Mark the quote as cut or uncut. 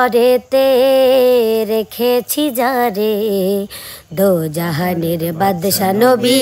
uncut